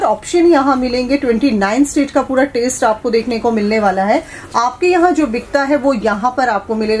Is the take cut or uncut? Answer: uncut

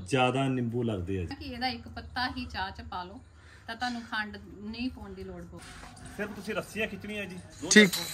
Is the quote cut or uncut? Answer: cut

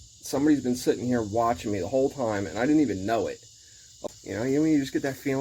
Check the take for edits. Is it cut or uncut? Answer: cut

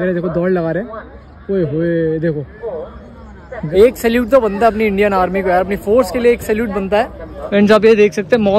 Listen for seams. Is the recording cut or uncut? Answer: cut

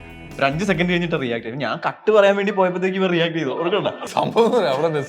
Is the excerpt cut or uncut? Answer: cut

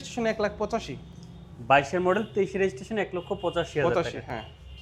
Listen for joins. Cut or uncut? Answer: uncut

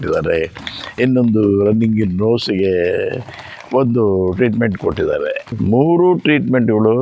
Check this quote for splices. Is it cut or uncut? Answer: cut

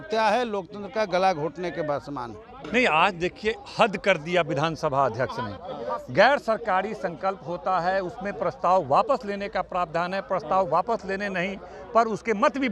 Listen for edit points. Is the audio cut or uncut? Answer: cut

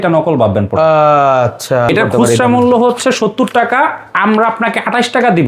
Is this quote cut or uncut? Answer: cut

